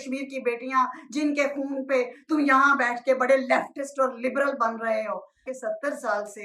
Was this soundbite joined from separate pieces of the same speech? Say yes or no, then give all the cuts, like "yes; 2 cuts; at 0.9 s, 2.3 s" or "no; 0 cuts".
yes; 1 cut; at 5.5 s